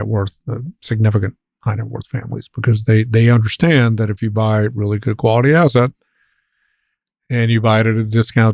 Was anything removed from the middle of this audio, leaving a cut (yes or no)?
no